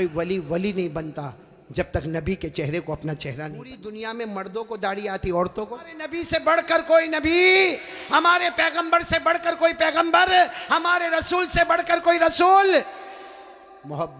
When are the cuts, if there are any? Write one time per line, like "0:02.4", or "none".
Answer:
0:03.8
0:06.1